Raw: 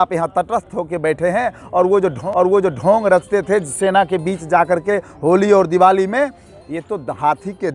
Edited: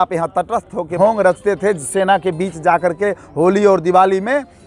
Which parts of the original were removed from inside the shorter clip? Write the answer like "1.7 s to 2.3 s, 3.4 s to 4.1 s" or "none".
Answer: 0.9 s to 2.8 s